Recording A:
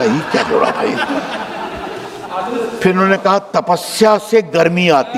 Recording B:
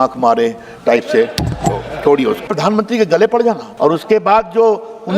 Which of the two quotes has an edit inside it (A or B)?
B